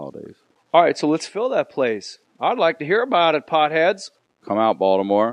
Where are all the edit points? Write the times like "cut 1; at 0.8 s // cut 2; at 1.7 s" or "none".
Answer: none